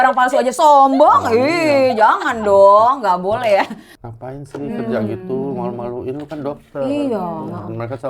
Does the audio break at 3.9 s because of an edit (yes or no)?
yes